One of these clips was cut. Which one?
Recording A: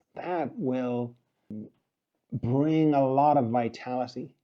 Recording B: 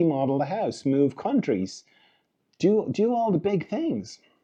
A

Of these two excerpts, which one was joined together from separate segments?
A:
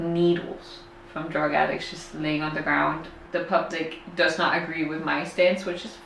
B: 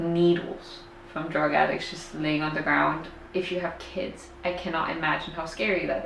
A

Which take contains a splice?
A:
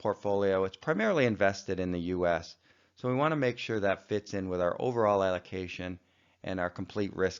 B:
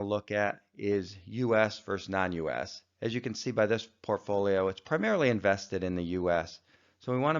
B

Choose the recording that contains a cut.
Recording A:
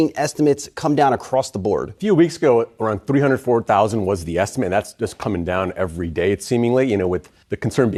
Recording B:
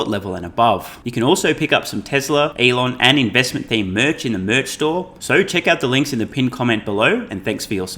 B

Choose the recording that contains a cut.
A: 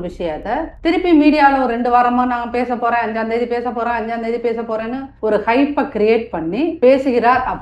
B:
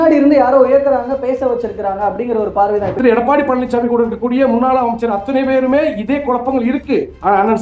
B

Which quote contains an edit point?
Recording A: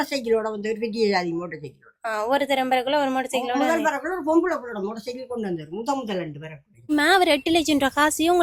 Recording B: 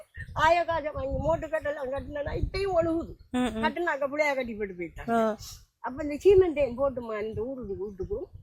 A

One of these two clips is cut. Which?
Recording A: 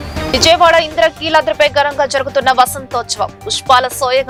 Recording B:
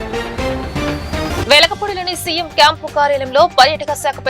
B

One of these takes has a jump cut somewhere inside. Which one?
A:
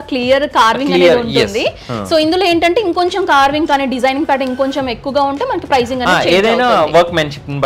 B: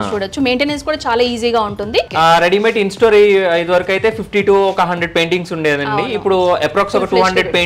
B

